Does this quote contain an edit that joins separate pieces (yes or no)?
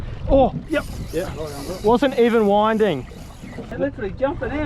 yes